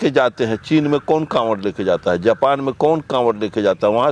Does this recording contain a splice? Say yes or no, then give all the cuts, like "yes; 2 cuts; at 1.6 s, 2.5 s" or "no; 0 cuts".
no; 0 cuts